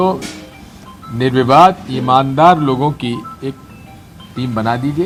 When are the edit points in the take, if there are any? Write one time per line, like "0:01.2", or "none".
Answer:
none